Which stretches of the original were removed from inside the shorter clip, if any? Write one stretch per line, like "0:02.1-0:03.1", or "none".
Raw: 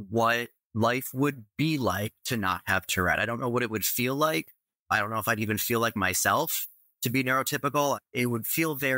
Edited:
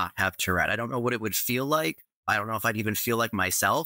0:04.6-0:04.7